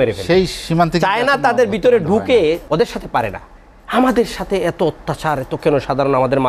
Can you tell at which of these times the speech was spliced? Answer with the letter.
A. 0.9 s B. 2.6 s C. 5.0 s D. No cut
B